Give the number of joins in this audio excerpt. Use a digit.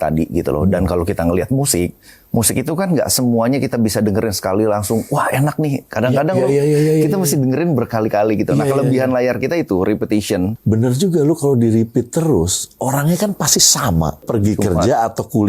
2